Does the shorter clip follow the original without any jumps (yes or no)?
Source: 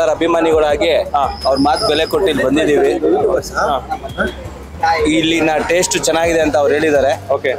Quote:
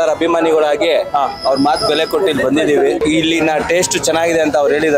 no